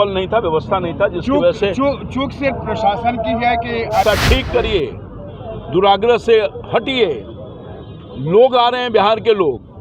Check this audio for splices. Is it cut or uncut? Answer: cut